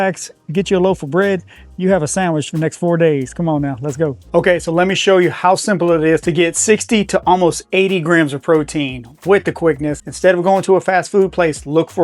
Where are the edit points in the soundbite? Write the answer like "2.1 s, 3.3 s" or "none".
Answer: 4.2 s, 10.1 s